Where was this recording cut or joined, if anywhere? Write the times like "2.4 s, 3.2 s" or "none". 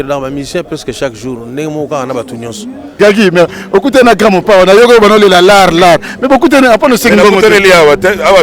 3.0 s